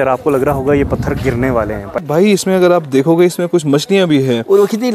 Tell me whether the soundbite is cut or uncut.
cut